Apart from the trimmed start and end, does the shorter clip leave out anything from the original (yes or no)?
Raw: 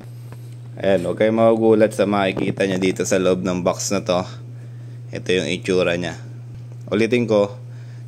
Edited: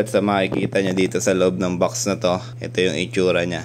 yes